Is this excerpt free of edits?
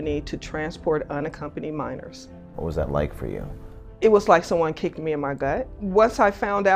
no; 2 cuts; at 2.6 s, 5.8 s

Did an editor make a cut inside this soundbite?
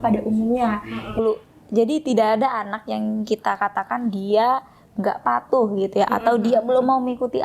yes; 1 cut; at 1.2 s

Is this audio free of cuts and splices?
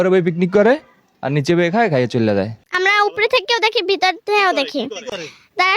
no; 1 cut; at 2.6 s

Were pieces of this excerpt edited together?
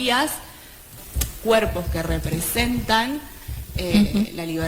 yes; 1 cut; at 0.9 s

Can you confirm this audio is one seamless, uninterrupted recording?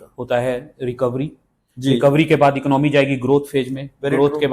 yes; 0 cuts

